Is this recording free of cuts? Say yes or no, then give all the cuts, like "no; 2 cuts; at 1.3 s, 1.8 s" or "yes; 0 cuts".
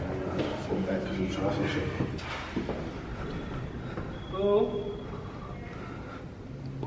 no; 1 cut; at 2.2 s